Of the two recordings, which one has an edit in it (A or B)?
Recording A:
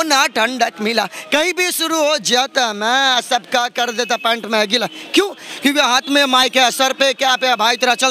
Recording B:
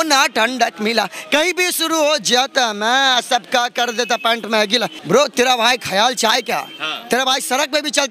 B